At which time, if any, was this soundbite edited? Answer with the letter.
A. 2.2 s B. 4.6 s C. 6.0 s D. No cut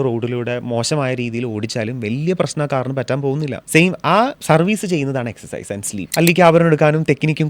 C